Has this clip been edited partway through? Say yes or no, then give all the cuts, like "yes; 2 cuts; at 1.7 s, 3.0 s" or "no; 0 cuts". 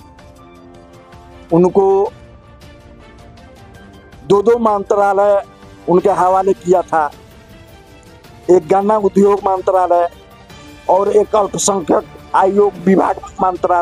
no; 0 cuts